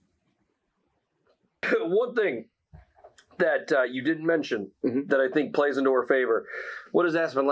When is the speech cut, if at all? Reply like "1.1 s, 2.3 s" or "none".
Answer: 1.7 s